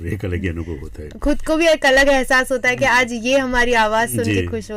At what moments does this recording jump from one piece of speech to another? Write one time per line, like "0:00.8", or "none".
none